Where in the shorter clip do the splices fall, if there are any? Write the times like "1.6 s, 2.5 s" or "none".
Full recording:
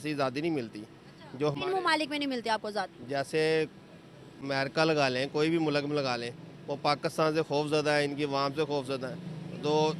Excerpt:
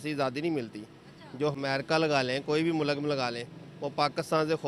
1.6 s

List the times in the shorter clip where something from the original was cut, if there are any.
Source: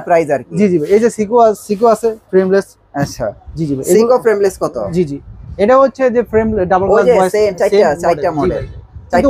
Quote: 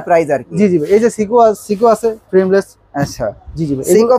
none

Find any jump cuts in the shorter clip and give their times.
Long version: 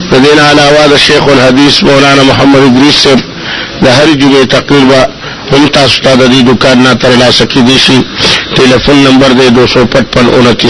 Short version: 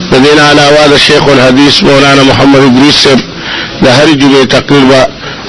none

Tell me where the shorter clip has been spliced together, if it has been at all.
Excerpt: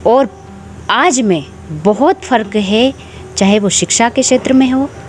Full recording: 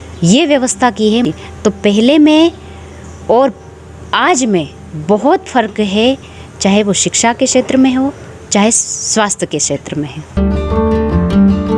none

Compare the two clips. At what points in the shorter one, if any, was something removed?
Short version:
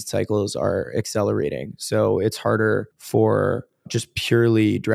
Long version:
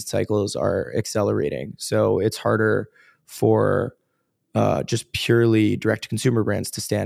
3.0 s, 4.0 s

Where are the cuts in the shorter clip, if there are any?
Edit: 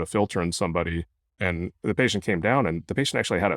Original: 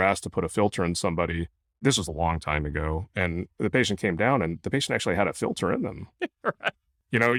1.3 s

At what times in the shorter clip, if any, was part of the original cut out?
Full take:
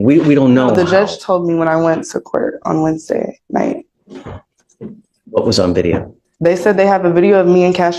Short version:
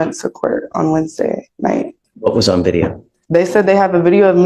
2.0 s

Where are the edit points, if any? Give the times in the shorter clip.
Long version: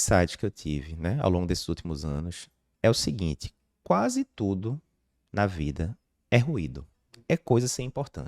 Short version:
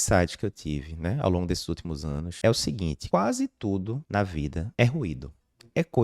2.3 s, 3.0 s, 4.4 s

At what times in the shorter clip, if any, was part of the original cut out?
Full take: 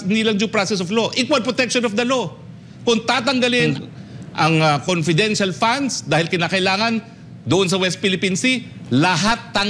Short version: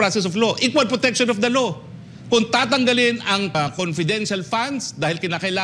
3.5 s

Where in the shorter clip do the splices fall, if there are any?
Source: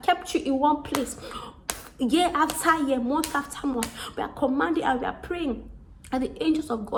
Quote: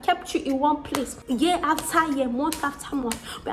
1.2 s

